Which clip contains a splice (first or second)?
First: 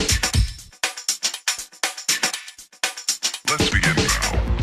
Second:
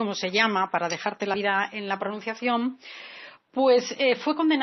second